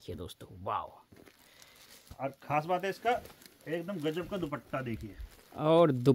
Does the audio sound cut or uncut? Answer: uncut